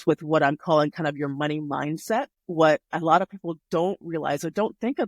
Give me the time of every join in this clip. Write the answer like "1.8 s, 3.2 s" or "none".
2.4 s